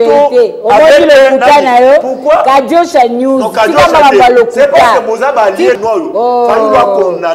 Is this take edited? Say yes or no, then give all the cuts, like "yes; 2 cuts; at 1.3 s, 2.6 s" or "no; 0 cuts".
yes; 1 cut; at 5.8 s